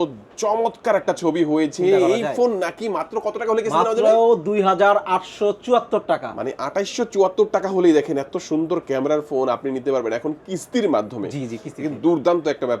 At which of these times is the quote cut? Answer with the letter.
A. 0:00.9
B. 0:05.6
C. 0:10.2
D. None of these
D